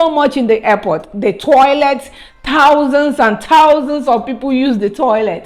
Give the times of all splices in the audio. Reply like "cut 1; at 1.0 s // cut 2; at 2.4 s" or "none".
none